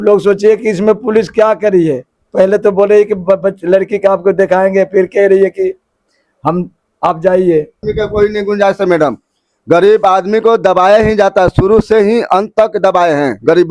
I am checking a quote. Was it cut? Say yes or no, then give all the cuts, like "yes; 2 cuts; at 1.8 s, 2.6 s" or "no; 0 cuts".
yes; 1 cut; at 7.8 s